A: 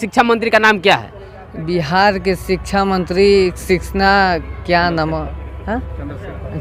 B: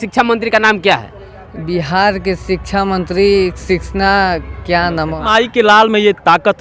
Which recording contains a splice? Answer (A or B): B